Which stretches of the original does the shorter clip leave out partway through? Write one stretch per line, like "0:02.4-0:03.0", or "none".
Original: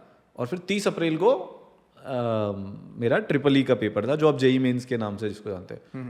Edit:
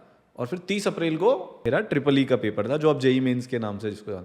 0:01.5-0:02.9